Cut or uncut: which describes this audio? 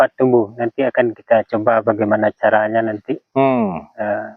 uncut